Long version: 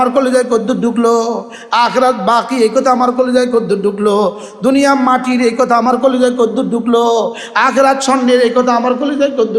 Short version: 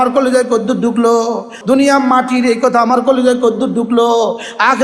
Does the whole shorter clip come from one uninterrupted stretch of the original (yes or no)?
no